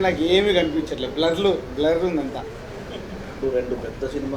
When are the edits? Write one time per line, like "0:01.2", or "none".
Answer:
none